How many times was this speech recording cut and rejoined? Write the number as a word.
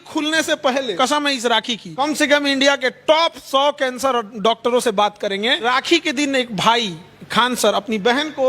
three